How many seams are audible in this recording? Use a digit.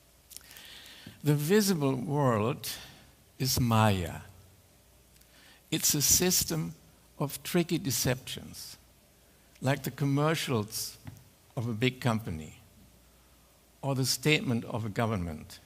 1